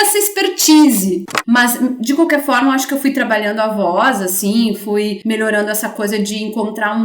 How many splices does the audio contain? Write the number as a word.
one